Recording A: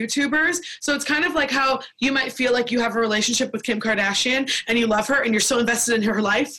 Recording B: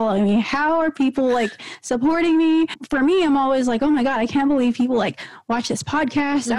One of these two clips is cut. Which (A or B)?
B